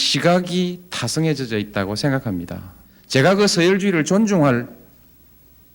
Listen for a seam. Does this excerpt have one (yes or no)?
no